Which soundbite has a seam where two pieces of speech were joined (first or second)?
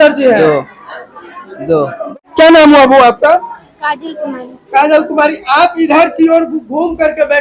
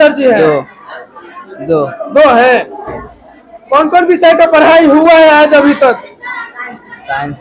first